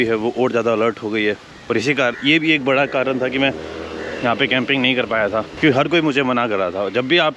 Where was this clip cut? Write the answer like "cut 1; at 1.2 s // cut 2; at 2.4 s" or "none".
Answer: none